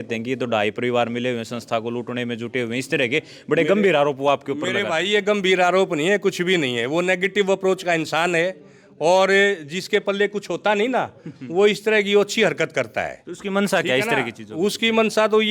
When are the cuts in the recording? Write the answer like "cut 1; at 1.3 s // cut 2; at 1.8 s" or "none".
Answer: none